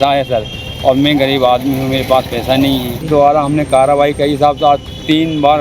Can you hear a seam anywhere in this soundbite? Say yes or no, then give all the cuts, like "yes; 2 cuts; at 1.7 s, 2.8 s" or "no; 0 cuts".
yes; 1 cut; at 3.0 s